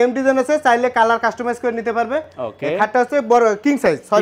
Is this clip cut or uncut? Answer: uncut